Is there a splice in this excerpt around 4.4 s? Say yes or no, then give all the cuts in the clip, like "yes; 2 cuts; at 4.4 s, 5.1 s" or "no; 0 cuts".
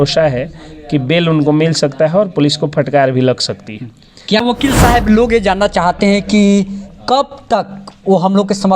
yes; 1 cut; at 4.4 s